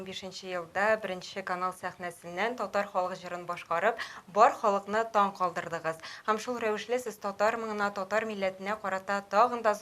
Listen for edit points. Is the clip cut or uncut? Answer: uncut